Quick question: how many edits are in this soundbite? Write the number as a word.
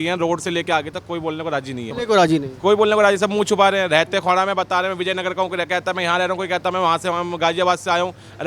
zero